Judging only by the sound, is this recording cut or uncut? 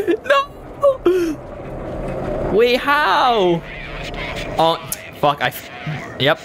uncut